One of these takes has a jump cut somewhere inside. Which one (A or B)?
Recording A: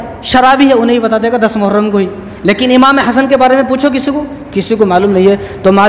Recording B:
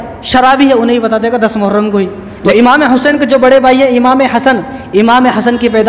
B